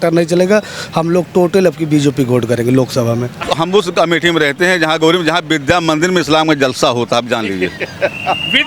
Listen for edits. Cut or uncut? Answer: cut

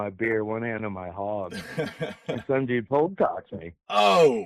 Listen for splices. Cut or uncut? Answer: cut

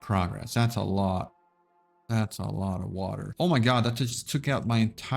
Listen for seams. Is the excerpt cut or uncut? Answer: cut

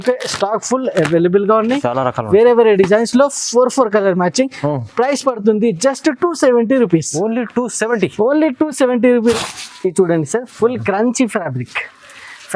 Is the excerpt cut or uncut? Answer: cut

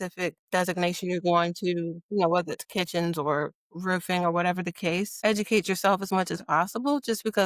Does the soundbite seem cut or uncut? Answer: uncut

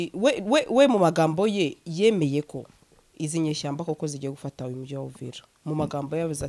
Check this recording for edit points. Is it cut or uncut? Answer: uncut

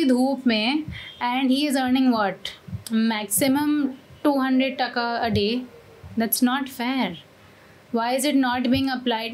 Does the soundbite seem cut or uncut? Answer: uncut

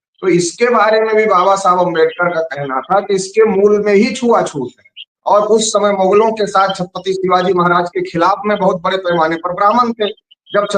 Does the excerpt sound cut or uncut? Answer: cut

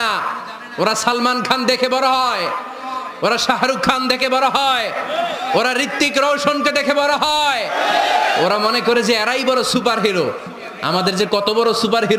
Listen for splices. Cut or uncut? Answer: uncut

